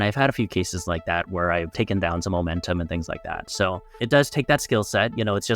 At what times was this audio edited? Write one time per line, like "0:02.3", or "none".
0:04.0